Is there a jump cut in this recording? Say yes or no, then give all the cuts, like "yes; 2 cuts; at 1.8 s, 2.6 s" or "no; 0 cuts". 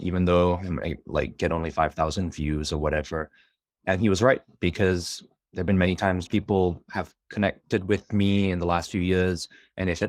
no; 0 cuts